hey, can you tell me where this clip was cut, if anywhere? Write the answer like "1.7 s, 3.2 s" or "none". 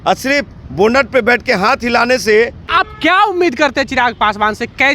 2.6 s